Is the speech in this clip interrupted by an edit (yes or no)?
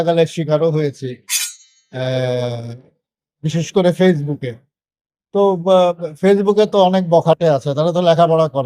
no